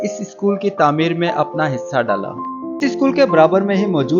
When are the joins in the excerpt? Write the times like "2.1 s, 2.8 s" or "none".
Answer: 2.8 s